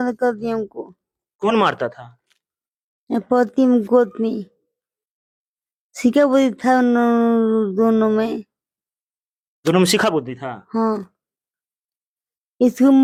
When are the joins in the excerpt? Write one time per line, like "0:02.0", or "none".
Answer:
none